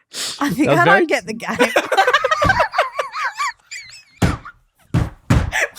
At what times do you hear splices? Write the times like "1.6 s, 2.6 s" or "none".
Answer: 4.0 s